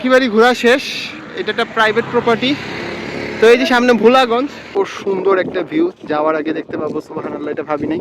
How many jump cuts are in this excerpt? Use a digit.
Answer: 1